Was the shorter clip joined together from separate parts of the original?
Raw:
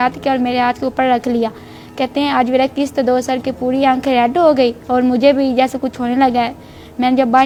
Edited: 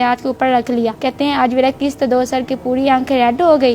yes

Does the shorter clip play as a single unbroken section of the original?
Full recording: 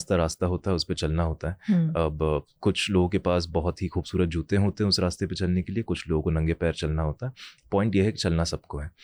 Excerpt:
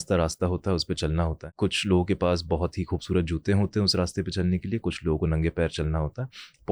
no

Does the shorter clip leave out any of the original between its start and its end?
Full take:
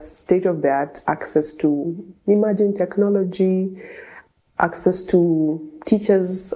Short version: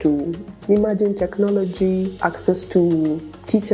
yes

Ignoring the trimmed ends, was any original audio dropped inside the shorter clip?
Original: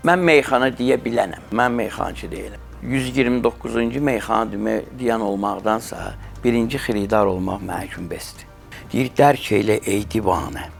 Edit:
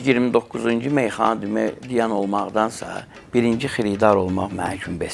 no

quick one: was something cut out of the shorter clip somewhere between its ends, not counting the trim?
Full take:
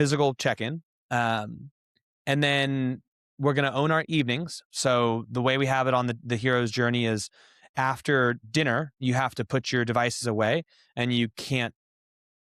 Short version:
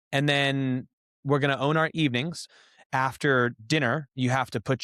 yes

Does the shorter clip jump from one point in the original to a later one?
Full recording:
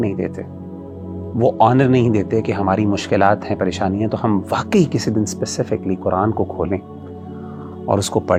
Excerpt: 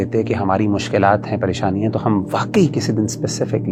no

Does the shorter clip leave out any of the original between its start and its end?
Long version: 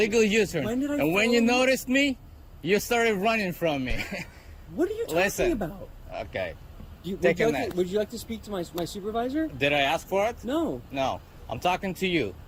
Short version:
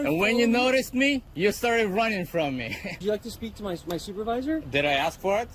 yes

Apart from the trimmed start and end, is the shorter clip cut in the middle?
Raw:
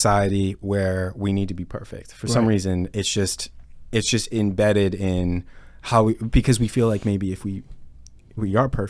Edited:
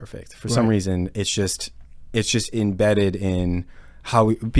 no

